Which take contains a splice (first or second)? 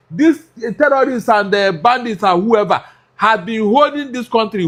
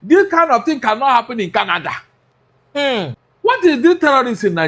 second